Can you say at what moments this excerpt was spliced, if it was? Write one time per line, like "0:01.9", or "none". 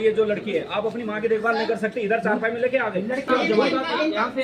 0:03.3